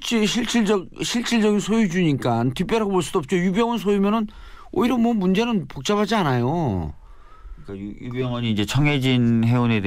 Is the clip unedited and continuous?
no; 1 cut; at 2.8 s

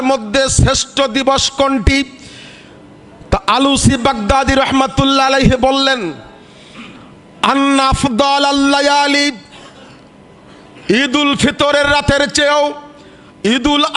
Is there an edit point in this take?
no; 0 cuts

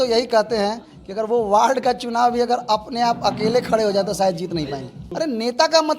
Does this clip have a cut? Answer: yes; 1 cut; at 5.0 s

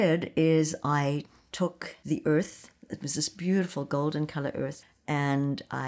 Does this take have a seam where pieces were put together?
yes; 1 cut; at 1.9 s

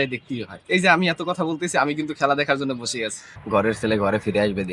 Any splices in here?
yes; 1 cut; at 3.4 s

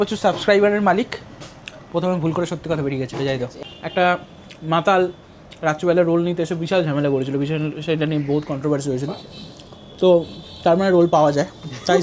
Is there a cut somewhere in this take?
yes; 1 cut; at 3.6 s

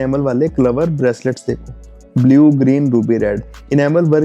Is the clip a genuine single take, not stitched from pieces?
yes; 0 cuts

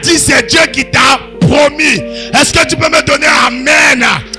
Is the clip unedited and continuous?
yes; 0 cuts

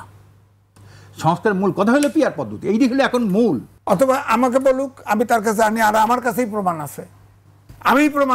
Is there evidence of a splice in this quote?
yes; 1 cut; at 3.7 s

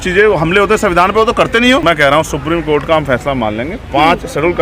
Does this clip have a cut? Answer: yes; 1 cut; at 1.8 s

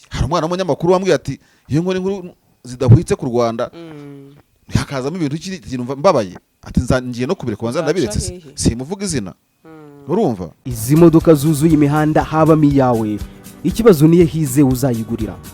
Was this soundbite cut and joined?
yes; 1 cut; at 10.7 s

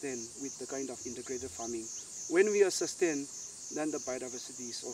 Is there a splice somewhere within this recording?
yes; 1 cut; at 4.0 s

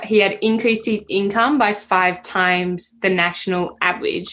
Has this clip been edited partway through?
no; 0 cuts

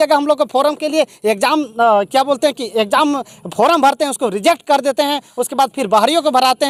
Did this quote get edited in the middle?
no; 0 cuts

